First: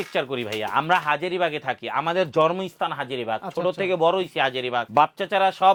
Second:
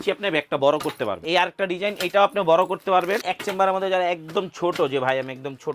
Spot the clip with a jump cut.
second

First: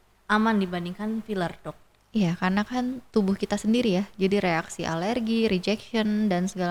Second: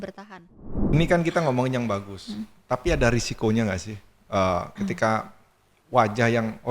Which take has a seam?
second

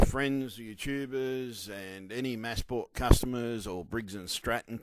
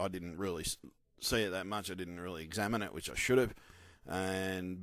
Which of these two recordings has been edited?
second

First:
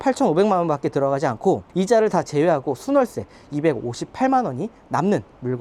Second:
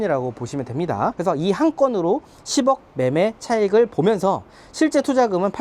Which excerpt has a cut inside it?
second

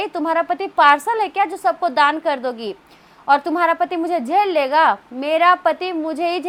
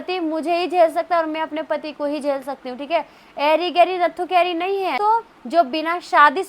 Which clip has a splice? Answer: second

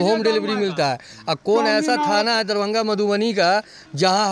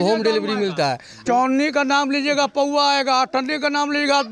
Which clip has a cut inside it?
second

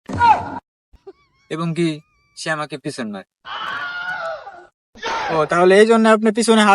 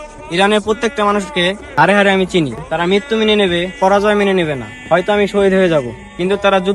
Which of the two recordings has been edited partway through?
first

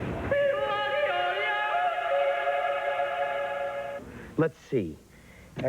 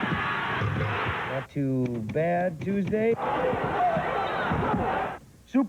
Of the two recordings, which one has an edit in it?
first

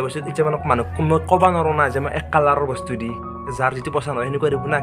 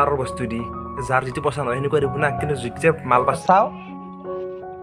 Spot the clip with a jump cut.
second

